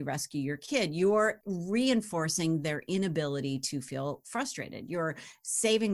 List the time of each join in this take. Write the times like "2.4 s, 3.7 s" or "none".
1.4 s